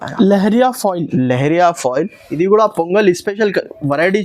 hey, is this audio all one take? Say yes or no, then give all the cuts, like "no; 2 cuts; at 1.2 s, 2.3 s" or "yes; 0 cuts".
no; 1 cut; at 2.2 s